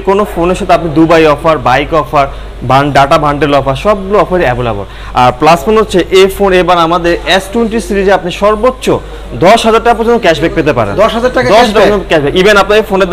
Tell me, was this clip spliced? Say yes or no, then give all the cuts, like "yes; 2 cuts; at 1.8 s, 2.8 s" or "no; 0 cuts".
no; 0 cuts